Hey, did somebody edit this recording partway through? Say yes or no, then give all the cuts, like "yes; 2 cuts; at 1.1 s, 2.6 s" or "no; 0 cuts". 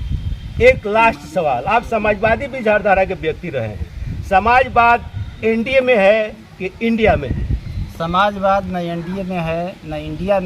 no; 0 cuts